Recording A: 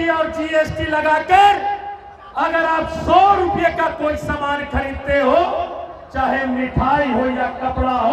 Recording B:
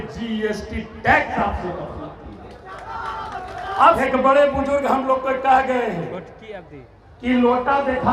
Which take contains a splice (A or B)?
B